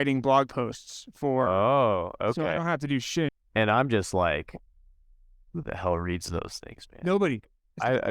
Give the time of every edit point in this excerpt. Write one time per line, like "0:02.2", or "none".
0:03.3